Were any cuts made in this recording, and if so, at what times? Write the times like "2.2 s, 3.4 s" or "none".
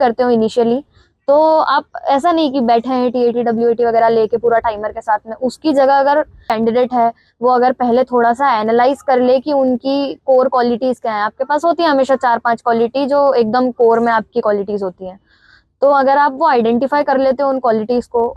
6.5 s